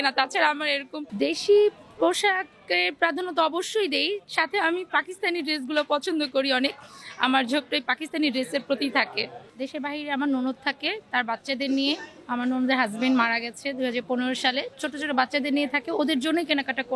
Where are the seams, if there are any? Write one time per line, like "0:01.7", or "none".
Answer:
0:01.0
0:09.4